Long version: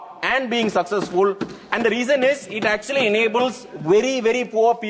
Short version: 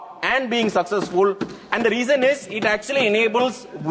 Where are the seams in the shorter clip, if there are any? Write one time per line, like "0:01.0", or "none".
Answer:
none